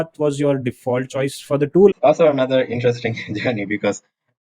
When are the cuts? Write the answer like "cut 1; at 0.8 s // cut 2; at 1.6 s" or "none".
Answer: cut 1; at 1.9 s